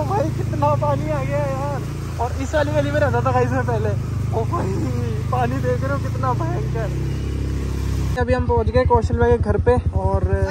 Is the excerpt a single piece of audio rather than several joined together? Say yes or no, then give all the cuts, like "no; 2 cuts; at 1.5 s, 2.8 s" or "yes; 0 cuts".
yes; 0 cuts